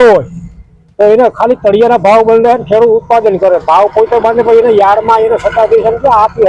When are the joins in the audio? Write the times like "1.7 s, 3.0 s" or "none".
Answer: none